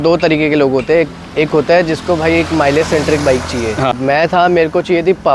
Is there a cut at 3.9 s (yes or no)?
yes